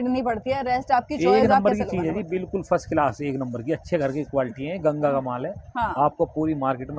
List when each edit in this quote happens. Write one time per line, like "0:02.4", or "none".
none